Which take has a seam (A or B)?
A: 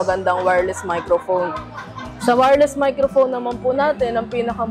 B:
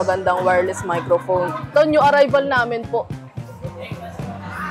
B